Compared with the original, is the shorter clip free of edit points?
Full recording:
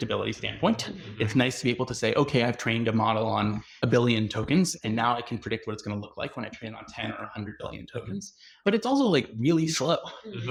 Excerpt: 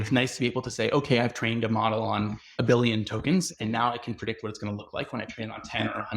yes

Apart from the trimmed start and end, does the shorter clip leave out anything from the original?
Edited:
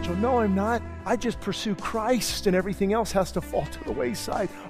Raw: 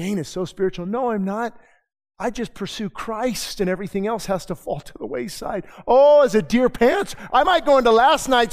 yes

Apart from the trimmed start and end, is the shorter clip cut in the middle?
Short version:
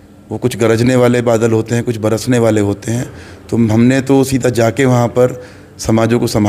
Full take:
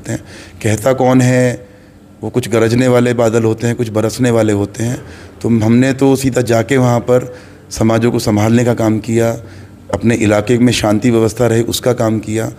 no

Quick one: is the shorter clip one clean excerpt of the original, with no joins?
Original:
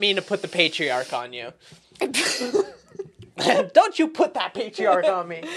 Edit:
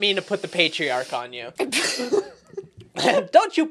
no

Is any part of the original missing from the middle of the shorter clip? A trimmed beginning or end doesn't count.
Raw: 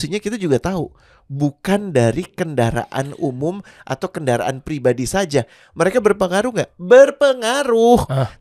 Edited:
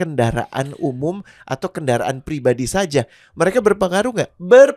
no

